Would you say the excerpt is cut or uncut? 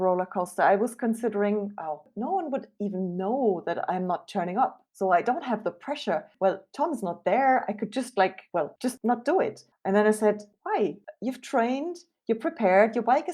cut